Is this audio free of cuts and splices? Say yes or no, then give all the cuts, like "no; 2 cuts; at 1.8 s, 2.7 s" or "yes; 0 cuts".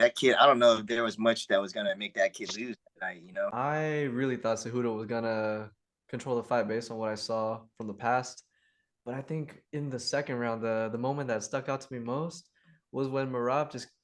no; 1 cut; at 3.5 s